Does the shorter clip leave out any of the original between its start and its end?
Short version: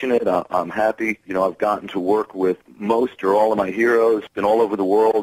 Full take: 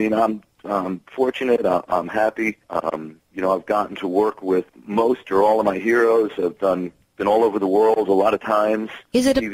yes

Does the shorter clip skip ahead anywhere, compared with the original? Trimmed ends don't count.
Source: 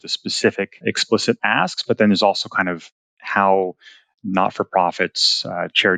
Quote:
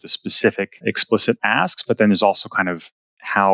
no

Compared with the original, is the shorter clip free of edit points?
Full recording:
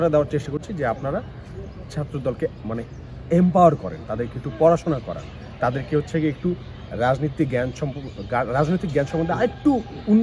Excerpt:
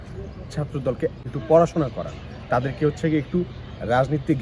no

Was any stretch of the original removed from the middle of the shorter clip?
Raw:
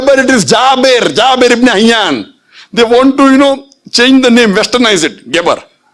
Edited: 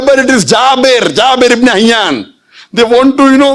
no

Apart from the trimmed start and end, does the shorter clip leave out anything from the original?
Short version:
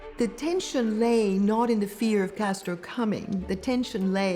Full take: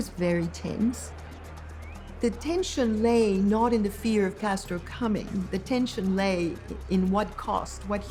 no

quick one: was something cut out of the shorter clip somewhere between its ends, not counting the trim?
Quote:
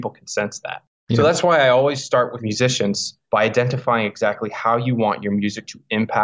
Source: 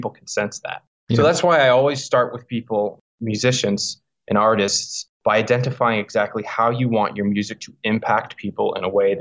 yes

